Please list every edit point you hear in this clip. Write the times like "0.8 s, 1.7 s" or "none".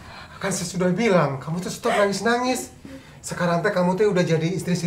none